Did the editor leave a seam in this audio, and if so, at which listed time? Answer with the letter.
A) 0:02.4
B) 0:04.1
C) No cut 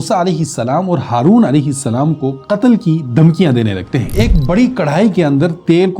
B